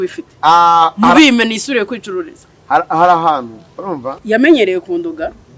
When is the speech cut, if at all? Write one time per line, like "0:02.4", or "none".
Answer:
0:04.1